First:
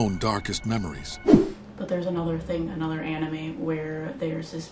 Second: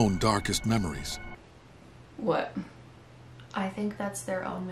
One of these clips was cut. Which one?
second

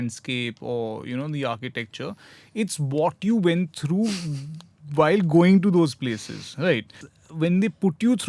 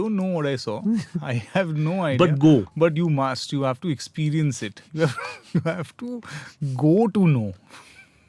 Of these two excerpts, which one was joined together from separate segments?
first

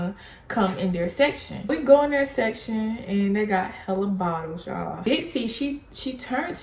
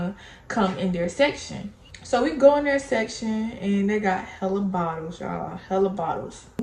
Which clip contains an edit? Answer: first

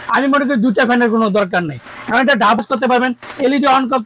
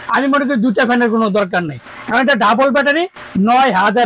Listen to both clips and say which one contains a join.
first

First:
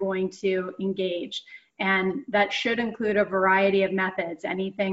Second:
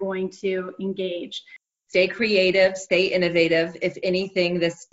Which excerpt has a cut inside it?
second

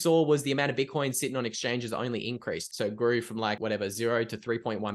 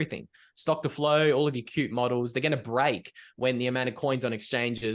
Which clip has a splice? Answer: first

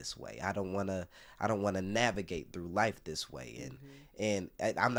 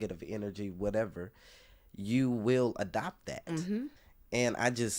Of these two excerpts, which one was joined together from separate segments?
second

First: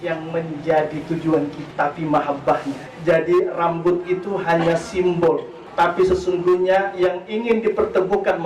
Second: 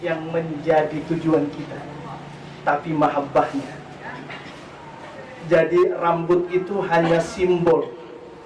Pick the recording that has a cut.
first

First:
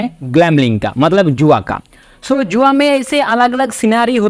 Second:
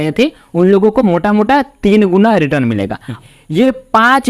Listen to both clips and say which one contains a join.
second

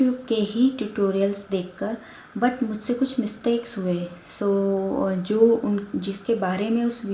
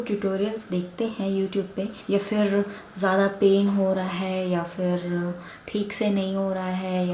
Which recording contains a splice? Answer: second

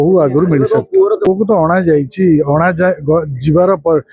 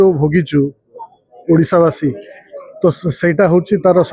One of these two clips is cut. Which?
first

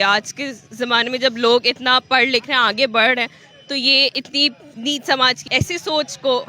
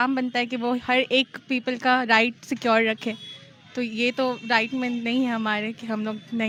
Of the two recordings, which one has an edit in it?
first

